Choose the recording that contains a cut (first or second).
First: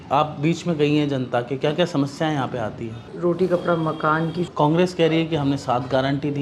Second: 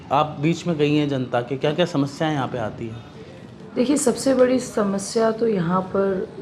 first